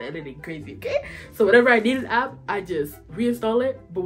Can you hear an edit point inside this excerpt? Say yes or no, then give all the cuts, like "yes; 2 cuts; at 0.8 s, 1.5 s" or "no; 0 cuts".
no; 0 cuts